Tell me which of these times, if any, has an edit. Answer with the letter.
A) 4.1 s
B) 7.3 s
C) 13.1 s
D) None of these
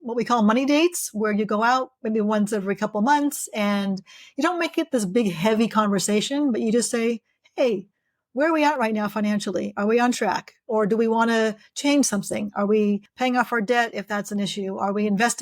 C